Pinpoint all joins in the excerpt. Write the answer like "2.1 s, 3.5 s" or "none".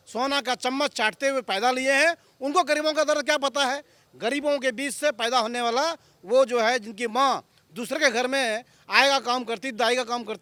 none